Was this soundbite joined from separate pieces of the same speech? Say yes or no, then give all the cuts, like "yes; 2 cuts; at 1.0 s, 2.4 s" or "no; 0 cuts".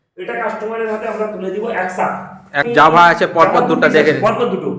yes; 1 cut; at 2.7 s